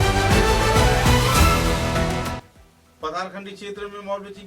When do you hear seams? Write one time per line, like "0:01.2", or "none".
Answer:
0:02.3